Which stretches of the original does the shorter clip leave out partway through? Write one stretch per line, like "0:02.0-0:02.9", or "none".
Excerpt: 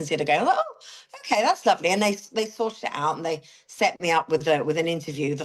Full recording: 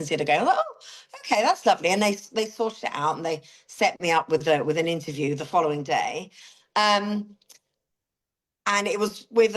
none